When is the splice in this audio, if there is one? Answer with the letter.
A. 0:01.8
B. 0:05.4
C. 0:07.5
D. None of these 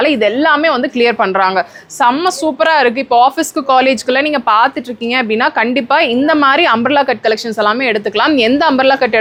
D